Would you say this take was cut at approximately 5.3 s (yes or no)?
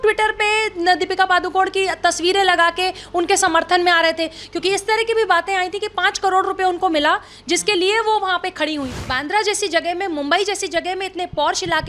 no